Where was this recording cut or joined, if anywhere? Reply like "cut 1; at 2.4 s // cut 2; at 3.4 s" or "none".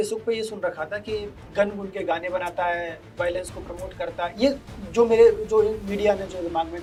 none